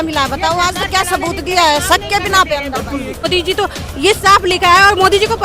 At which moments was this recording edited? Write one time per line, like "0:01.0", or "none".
0:03.2